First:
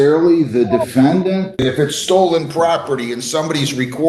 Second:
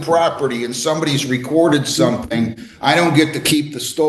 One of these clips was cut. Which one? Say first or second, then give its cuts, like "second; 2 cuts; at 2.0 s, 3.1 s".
first; 1 cut; at 1.6 s